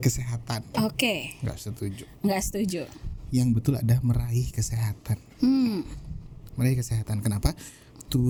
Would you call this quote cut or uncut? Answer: uncut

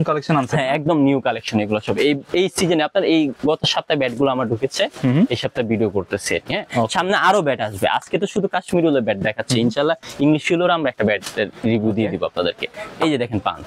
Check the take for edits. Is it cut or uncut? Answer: uncut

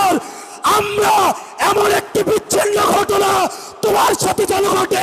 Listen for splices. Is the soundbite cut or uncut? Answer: uncut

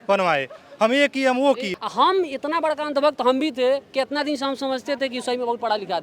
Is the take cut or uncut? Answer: cut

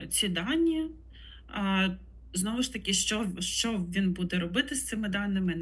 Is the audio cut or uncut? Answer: uncut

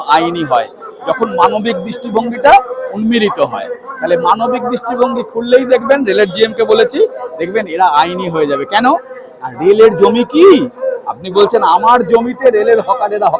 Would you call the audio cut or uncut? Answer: uncut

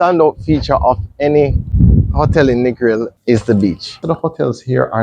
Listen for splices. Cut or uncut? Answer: cut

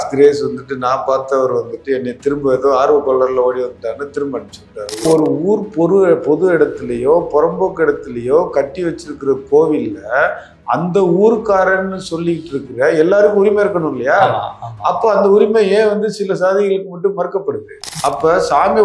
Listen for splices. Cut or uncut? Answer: cut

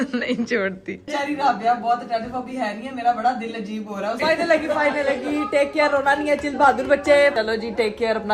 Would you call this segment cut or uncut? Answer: cut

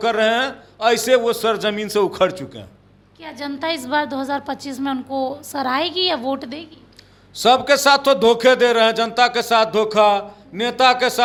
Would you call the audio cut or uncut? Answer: uncut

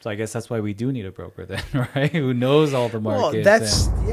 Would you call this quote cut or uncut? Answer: uncut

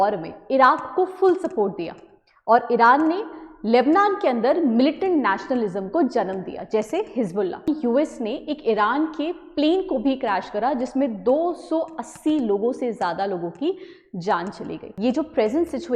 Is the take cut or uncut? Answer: cut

